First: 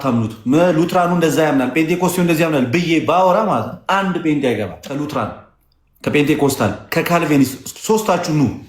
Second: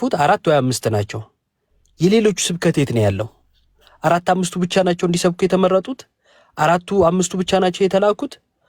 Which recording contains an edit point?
first; 1 cut; at 4.8 s

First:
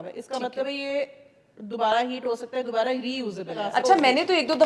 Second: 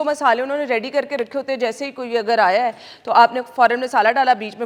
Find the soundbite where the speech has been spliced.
first; 1 cut; at 3.8 s

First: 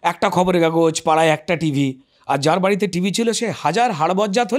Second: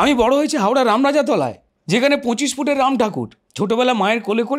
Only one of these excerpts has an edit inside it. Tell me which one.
second; 2 cuts; at 1.7 s, 3.4 s

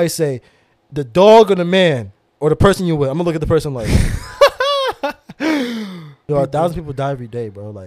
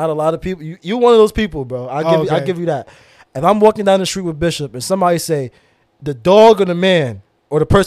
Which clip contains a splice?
first; 1 cut; at 6.2 s

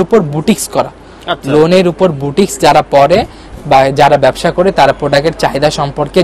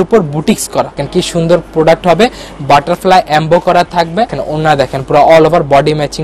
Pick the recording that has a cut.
second; 2 cuts; at 1.0 s, 4.4 s

